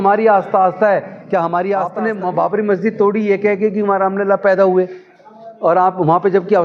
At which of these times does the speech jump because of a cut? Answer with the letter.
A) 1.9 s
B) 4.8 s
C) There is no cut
A